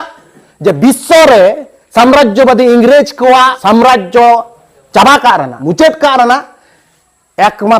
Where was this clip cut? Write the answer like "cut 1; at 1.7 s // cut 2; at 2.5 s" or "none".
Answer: cut 1; at 3.6 s // cut 2; at 5.5 s

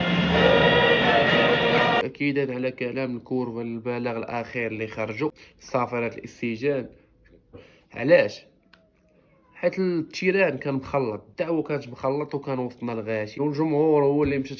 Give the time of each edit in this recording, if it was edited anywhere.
cut 1; at 2.0 s // cut 2; at 5.5 s // cut 3; at 7.6 s // cut 4; at 13.4 s

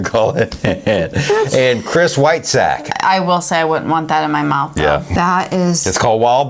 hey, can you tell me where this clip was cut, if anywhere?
cut 1; at 2.8 s // cut 2; at 5.1 s

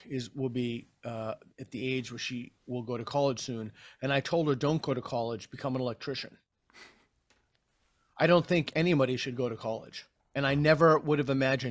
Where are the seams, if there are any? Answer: none

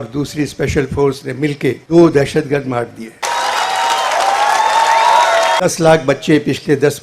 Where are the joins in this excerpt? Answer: cut 1; at 3.2 s // cut 2; at 5.6 s

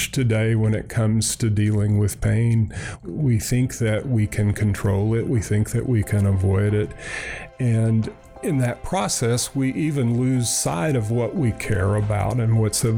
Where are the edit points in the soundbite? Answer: cut 1; at 3.0 s // cut 2; at 8.2 s

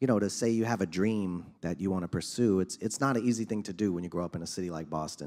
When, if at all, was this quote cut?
none

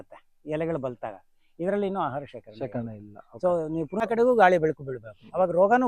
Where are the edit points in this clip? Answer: cut 1; at 4.0 s

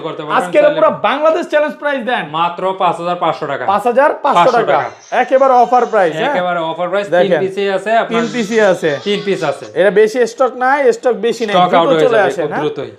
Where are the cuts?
none

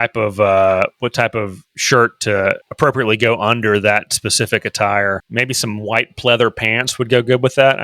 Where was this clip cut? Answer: cut 1; at 2.7 s // cut 2; at 5.3 s

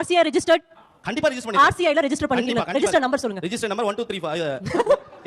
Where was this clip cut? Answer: none

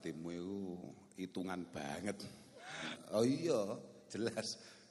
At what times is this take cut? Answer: cut 1; at 3.0 s

